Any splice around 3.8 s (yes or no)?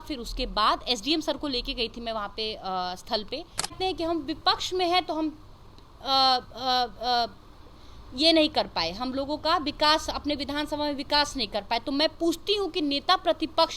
yes